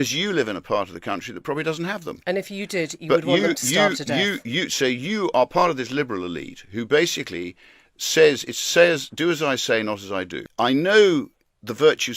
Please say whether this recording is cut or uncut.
cut